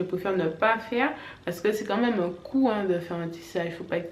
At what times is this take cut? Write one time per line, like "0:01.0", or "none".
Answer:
none